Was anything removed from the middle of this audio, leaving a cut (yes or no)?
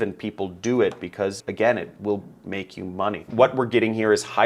yes